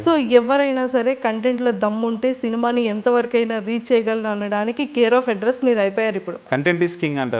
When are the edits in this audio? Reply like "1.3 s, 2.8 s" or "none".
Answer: 6.4 s